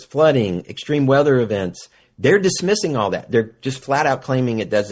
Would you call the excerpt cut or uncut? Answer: cut